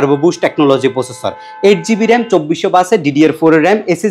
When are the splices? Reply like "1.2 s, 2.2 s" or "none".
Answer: none